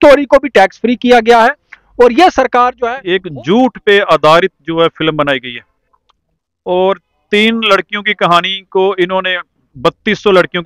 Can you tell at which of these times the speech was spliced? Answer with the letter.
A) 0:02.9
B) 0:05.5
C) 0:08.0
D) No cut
A